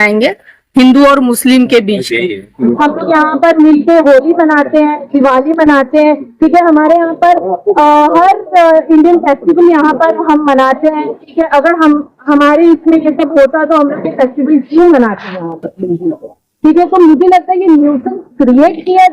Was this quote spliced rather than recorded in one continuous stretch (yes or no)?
yes